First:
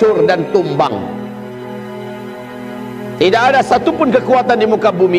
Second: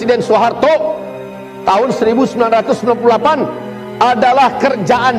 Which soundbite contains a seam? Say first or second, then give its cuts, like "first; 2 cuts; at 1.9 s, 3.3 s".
first; 2 cuts; at 1.0 s, 2.8 s